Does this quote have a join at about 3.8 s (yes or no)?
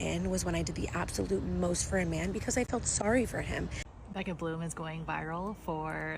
yes